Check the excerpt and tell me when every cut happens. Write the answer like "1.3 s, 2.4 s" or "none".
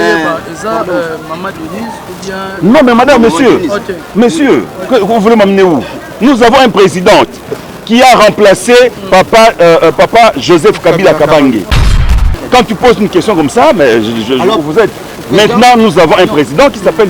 12.0 s

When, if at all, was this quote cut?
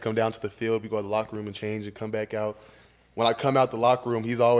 none

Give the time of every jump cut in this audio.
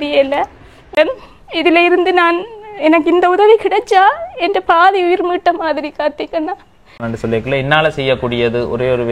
0.9 s, 7.1 s

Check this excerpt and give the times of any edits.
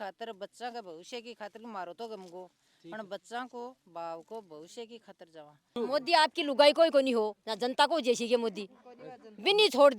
5.7 s

